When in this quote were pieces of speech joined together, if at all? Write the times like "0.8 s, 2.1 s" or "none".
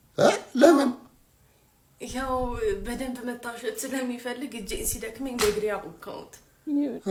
none